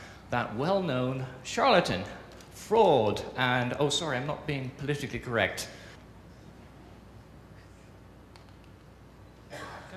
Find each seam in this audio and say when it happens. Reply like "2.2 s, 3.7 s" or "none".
none